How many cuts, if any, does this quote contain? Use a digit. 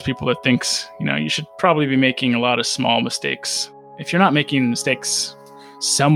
0